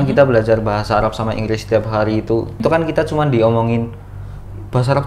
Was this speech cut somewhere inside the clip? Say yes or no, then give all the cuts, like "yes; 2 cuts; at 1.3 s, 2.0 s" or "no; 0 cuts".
yes; 1 cut; at 2.5 s